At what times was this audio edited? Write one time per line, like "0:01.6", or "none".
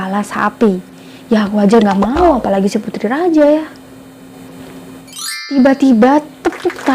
none